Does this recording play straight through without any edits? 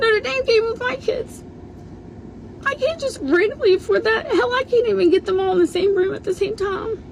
yes; 0 cuts

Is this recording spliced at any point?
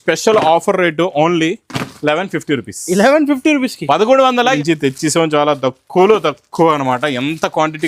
yes; 1 cut; at 4.5 s

